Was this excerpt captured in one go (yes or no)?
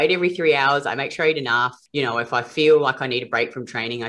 no